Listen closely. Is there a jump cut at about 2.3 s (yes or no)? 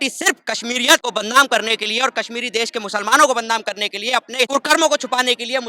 no